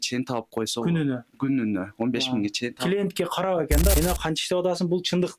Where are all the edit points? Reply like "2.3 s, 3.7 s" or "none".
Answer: 3.9 s